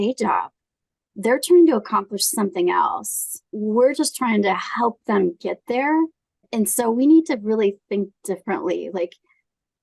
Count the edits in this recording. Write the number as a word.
two